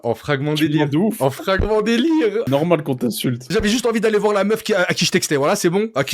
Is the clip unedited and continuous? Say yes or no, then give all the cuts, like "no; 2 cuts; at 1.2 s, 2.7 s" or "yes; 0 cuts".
no; 2 cuts; at 2.5 s, 3.4 s